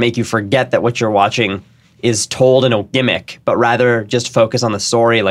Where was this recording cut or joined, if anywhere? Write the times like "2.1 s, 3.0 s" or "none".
none